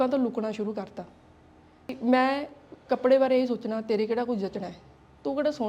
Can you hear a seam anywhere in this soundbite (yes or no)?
yes